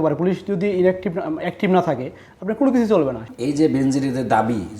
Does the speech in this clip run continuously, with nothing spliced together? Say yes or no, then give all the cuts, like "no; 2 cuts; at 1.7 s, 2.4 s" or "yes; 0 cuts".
no; 1 cut; at 3.2 s